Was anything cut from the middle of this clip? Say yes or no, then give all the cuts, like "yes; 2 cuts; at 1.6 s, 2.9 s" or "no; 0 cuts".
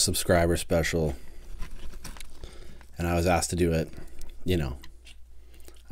no; 0 cuts